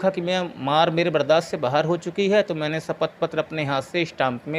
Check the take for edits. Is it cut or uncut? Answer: uncut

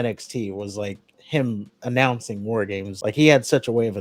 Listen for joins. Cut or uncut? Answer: cut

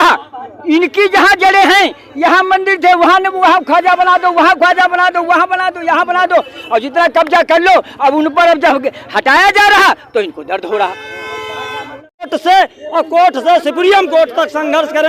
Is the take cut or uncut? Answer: cut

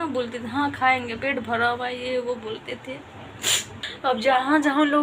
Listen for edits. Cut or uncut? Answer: cut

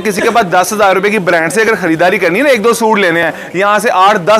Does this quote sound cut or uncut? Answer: uncut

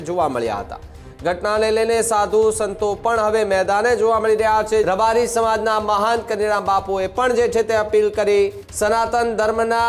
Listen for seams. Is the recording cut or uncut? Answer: cut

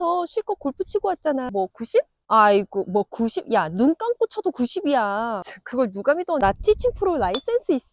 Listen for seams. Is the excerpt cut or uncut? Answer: cut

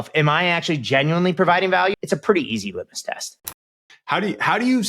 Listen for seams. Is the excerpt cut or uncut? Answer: cut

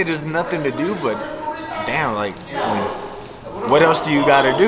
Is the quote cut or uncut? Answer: uncut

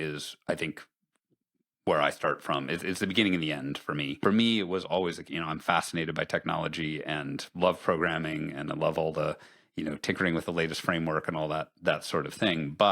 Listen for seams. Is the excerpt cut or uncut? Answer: cut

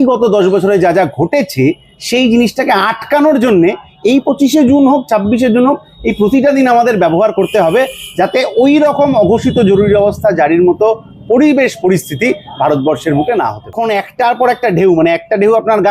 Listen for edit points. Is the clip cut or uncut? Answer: cut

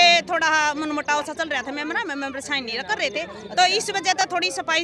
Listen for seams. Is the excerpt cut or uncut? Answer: uncut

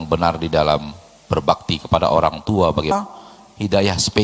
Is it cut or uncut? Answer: cut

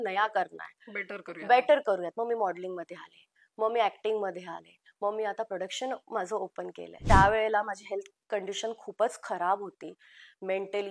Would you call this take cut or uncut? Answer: cut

